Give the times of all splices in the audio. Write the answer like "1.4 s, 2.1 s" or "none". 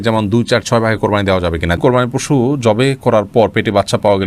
1.8 s